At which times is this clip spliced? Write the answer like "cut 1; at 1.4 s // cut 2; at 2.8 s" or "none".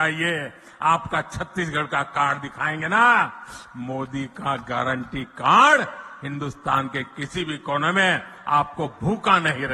none